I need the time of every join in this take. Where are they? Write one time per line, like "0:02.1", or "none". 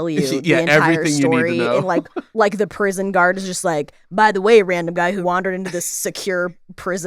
0:02.2